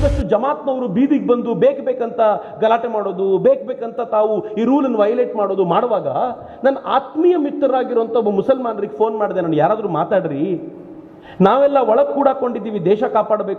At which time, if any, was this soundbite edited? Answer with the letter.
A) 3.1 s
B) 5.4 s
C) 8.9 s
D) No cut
D